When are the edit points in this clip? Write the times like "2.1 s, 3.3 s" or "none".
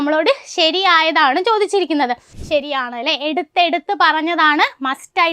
2.3 s